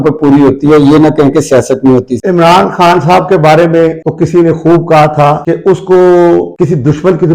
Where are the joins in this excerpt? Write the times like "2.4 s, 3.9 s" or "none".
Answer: 2.1 s, 4.0 s, 5.4 s, 6.5 s